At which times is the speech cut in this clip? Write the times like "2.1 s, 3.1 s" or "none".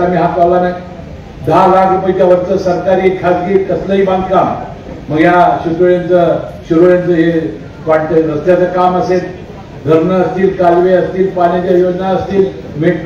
none